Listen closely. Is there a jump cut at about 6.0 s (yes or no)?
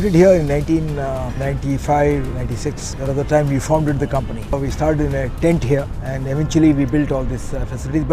yes